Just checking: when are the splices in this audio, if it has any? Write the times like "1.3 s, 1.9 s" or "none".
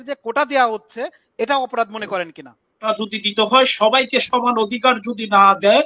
2.9 s